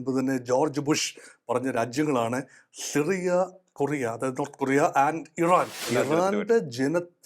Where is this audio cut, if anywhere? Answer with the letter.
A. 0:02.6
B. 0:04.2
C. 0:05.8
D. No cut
C